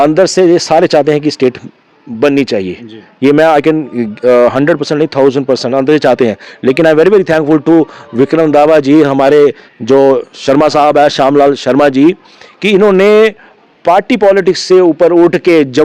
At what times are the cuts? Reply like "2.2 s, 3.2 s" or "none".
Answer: none